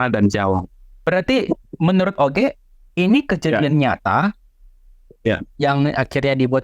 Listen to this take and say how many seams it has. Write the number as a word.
one